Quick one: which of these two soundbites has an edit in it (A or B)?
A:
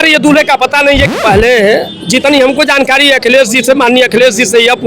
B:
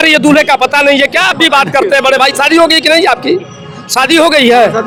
A